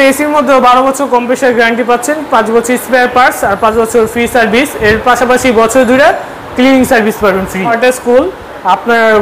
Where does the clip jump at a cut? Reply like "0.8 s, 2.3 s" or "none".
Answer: 7.7 s